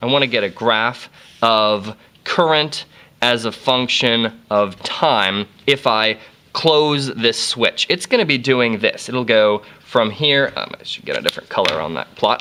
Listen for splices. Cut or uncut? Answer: uncut